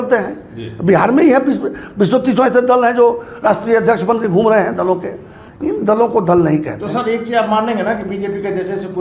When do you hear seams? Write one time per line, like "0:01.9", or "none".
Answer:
none